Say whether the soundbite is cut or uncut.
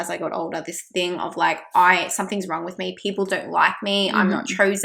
uncut